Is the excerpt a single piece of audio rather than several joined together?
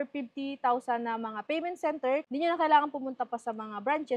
no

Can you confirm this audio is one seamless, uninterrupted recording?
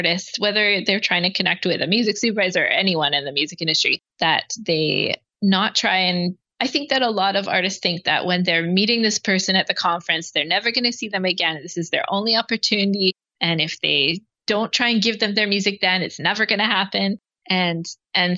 yes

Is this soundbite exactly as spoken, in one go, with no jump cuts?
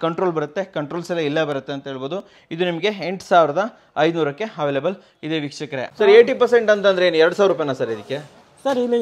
no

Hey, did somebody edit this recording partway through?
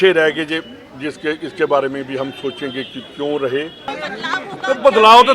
yes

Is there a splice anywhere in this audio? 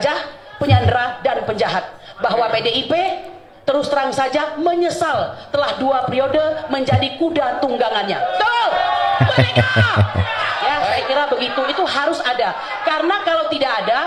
no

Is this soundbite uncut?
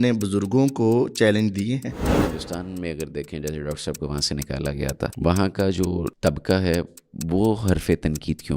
no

